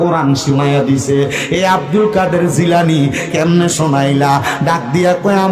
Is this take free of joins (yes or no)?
yes